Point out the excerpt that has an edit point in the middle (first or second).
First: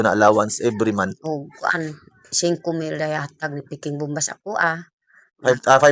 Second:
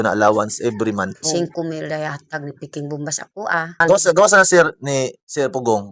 second